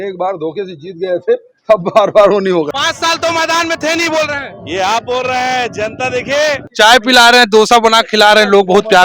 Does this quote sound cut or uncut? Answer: cut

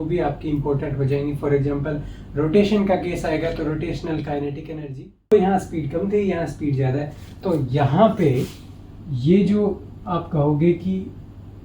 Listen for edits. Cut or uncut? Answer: cut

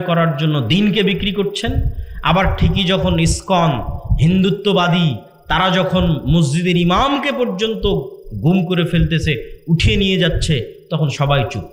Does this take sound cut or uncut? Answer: uncut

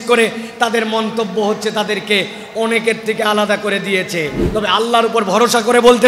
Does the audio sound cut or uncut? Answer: cut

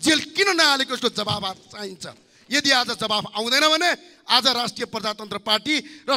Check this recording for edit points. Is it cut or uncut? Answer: uncut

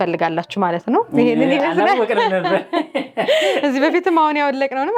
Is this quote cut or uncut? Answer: uncut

